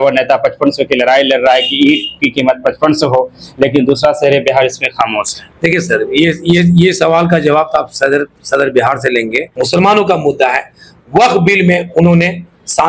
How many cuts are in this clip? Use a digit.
1